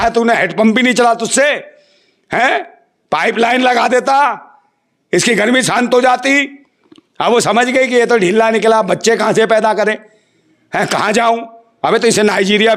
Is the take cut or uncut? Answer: uncut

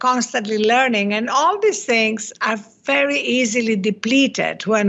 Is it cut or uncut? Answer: uncut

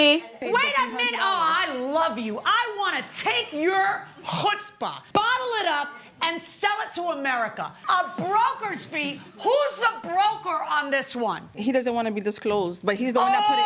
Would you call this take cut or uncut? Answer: uncut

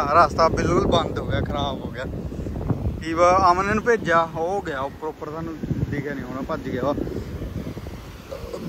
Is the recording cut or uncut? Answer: uncut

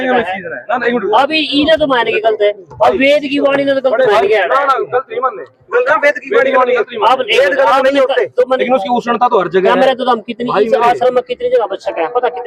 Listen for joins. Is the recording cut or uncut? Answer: cut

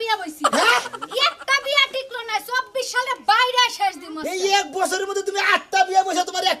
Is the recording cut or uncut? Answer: uncut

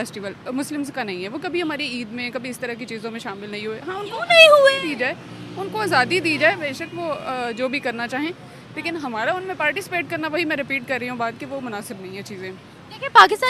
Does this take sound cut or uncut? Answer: uncut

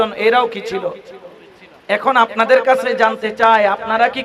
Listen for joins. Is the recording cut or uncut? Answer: uncut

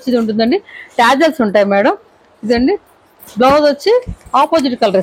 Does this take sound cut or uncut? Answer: uncut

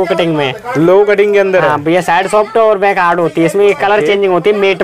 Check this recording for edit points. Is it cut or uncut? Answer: uncut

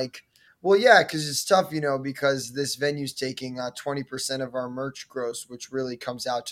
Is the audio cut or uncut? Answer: uncut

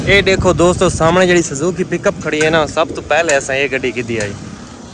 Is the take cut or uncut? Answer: uncut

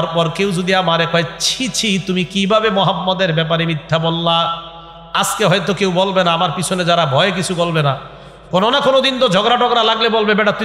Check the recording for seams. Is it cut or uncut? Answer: uncut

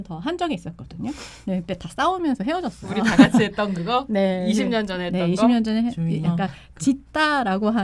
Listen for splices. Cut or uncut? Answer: uncut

